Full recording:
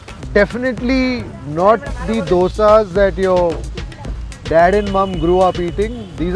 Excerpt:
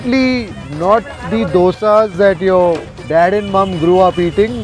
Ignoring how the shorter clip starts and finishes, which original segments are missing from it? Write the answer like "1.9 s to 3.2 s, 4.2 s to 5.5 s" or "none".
3.7 s to 4.3 s